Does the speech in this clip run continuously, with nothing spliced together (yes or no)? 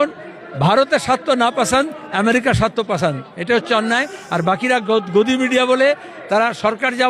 yes